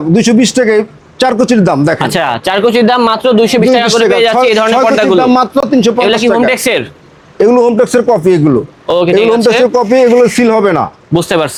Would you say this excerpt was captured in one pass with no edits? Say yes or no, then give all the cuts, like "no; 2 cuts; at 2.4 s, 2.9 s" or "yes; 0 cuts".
yes; 0 cuts